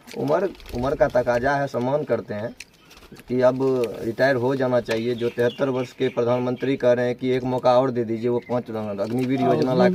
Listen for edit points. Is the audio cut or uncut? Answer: uncut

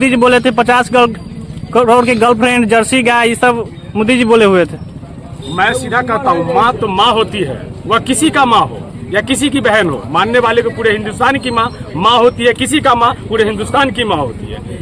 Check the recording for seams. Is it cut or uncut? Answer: uncut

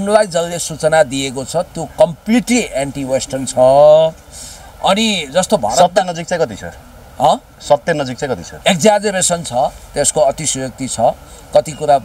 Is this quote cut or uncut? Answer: uncut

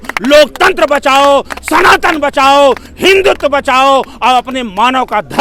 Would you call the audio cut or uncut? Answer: uncut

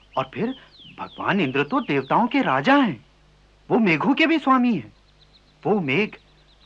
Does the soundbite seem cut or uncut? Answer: uncut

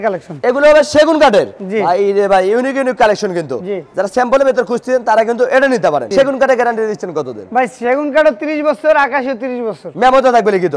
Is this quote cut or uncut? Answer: uncut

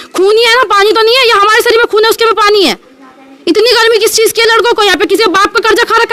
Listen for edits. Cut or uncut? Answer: uncut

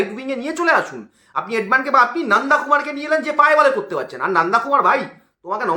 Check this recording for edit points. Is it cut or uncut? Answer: uncut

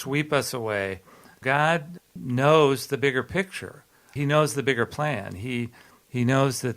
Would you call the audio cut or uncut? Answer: cut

